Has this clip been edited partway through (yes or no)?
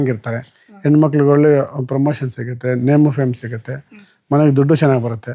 no